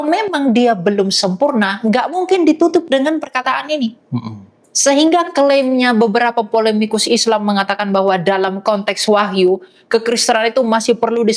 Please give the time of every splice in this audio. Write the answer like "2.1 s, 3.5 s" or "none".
none